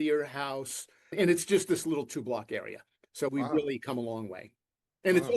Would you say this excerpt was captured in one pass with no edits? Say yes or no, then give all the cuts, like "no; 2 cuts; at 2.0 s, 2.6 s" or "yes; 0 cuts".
no; 1 cut; at 1.2 s